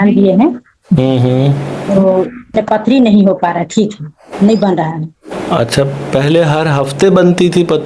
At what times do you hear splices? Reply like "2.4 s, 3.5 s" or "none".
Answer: 2.6 s

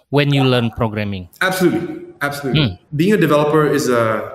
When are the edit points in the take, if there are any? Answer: 2.8 s

